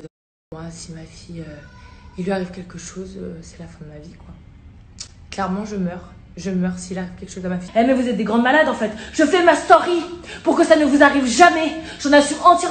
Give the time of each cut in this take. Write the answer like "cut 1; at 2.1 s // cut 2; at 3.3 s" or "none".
cut 1; at 7.6 s